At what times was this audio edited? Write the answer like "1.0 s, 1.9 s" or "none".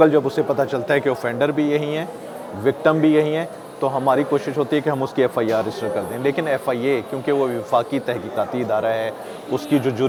none